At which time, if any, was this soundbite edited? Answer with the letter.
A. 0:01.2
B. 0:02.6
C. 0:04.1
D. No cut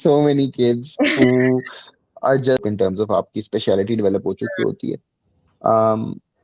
B